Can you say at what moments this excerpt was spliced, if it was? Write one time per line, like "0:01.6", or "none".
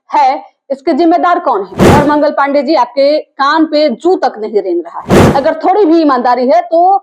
0:01.8
0:05.2